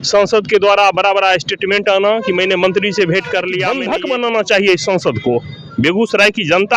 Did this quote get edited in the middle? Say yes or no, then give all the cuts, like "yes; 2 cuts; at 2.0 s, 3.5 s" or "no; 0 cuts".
yes; 1 cut; at 3.7 s